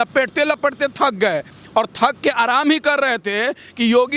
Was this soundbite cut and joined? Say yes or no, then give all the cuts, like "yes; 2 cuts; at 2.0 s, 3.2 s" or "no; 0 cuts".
no; 0 cuts